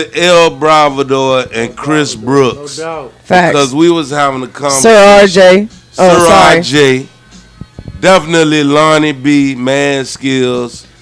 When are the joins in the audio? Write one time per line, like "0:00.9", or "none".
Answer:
none